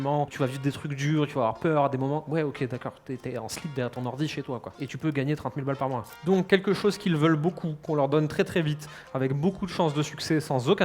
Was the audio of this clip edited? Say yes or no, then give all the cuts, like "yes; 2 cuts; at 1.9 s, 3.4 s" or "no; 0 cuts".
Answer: yes; 1 cut; at 6.1 s